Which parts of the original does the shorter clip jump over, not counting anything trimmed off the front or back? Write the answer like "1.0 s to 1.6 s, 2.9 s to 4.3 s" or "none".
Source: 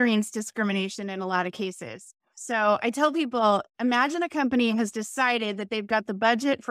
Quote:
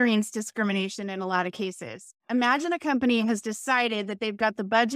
2.2 s to 3.7 s